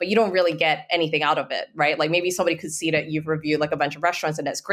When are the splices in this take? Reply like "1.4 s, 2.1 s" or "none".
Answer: none

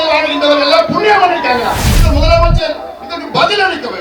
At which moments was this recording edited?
1.9 s

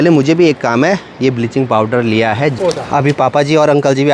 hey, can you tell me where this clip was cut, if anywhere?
2.6 s

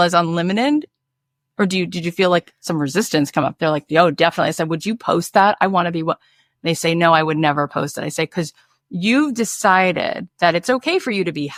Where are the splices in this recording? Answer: none

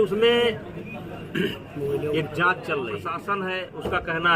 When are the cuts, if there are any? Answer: 3.1 s

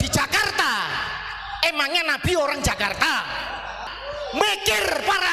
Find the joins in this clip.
3.9 s

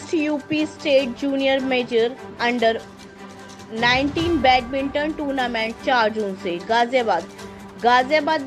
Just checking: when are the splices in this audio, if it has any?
none

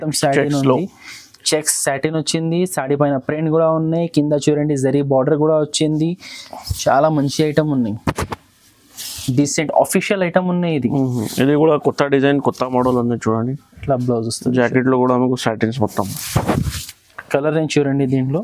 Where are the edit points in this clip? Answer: none

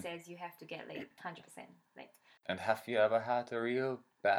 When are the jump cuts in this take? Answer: 1.1 s, 2.2 s

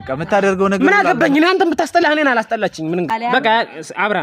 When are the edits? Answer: 3.1 s

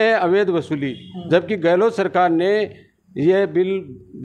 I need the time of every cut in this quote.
none

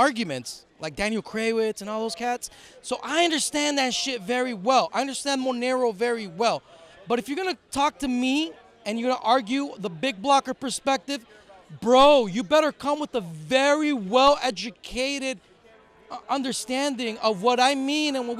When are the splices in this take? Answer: none

